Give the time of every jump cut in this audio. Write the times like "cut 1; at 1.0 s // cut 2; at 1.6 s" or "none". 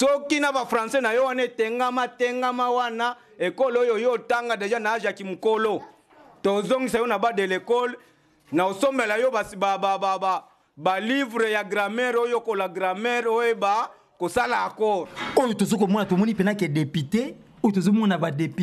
cut 1; at 15.2 s